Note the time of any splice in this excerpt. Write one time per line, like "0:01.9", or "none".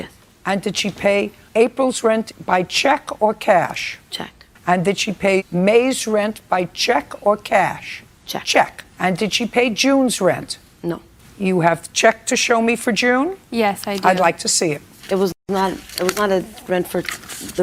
none